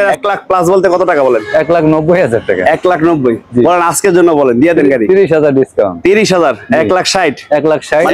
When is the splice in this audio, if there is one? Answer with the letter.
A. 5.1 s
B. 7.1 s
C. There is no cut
C